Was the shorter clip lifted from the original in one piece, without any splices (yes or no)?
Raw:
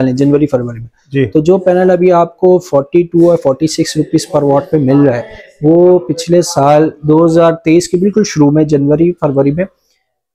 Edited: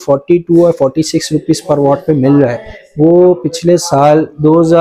yes